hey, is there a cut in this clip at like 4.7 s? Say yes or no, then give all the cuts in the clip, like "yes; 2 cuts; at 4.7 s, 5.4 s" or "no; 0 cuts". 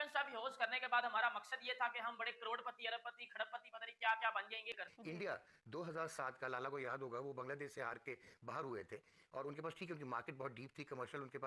yes; 1 cut; at 4.7 s